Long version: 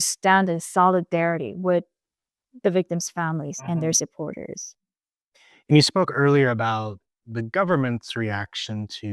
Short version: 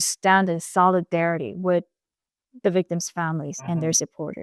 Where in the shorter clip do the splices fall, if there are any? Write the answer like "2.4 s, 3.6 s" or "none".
none